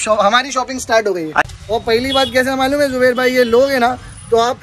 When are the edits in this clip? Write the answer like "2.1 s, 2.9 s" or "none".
1.5 s